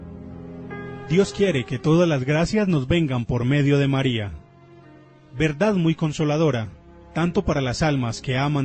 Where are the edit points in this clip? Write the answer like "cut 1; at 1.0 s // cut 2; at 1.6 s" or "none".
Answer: cut 1; at 1.1 s